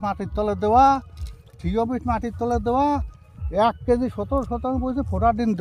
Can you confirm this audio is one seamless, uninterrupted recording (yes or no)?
yes